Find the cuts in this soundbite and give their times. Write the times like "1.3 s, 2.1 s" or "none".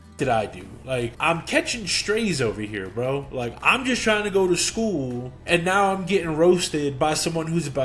1.2 s, 5.3 s